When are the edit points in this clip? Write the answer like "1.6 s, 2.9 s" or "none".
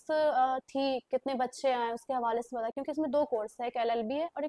none